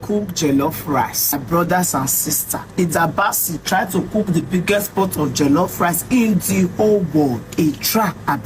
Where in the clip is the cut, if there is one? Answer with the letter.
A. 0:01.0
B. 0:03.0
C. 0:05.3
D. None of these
D